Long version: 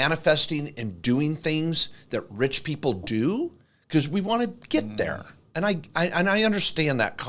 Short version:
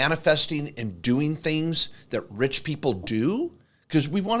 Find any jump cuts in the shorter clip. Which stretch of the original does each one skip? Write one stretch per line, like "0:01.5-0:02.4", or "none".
none

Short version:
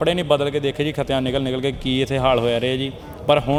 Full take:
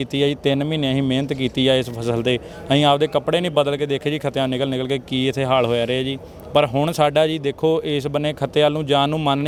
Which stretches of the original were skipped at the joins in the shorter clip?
none

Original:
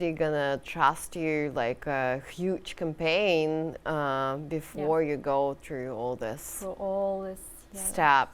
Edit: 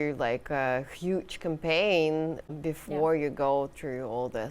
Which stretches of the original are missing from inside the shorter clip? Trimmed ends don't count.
0:03.8-0:04.3

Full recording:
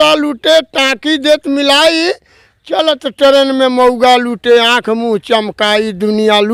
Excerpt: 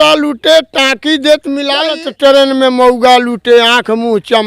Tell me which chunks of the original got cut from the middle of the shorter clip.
0:01.8-0:02.8

